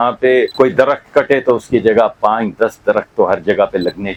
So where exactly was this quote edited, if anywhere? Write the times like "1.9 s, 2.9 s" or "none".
none